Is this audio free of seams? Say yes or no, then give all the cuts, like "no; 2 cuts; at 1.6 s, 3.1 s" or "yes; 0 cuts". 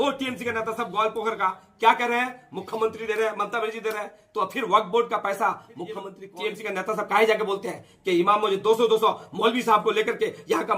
no; 1 cut; at 6.2 s